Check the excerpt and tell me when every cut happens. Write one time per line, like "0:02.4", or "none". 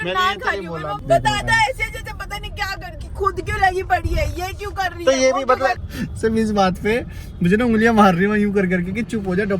0:00.9
0:02.8
0:05.9